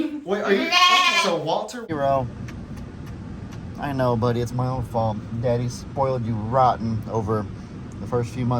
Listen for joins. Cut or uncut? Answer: cut